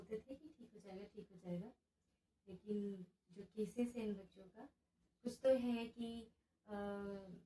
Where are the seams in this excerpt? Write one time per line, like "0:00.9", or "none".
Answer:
none